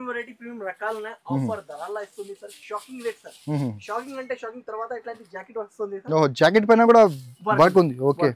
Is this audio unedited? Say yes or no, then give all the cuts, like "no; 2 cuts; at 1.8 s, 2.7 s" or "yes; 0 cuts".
yes; 0 cuts